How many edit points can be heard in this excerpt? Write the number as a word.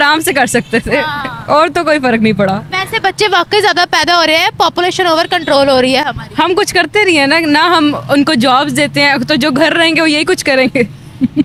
zero